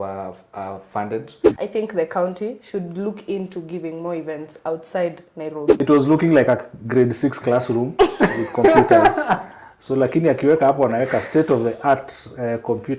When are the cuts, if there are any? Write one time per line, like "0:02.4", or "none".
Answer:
0:01.4
0:05.7